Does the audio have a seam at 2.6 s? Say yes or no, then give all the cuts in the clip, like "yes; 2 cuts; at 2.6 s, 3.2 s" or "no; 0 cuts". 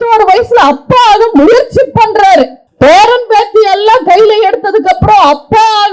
yes; 1 cut; at 2.6 s